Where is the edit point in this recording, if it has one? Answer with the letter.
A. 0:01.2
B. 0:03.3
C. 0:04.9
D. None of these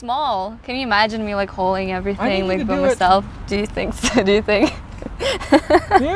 B